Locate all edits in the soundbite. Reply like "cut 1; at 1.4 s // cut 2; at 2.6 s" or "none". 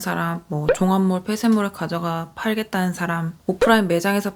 none